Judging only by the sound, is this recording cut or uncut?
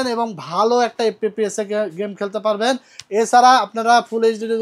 uncut